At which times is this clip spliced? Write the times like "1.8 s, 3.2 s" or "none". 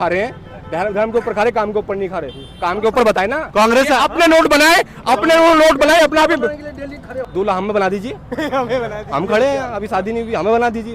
none